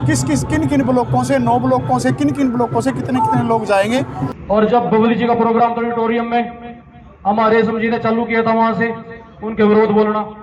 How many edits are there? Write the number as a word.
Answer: one